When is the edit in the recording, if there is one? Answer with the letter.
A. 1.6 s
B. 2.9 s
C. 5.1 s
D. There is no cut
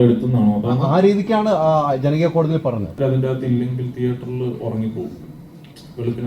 B